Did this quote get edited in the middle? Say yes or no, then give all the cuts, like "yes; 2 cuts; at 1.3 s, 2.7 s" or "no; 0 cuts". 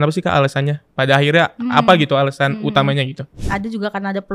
yes; 1 cut; at 3.3 s